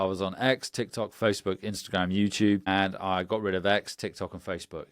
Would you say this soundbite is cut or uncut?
cut